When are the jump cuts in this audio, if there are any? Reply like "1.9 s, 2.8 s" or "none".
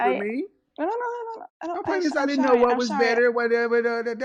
none